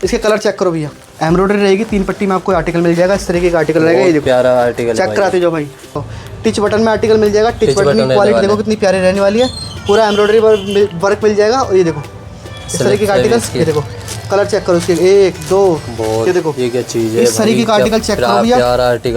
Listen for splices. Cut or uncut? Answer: cut